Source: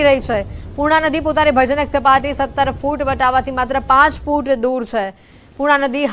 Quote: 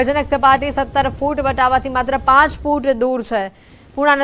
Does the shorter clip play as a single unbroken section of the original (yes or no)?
yes